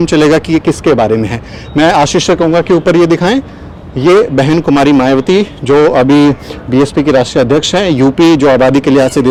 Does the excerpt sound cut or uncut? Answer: uncut